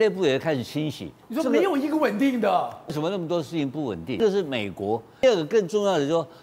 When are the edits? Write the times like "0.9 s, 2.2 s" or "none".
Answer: 1.2 s, 2.9 s, 4.2 s, 5.2 s